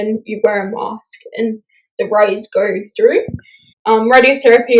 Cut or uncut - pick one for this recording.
cut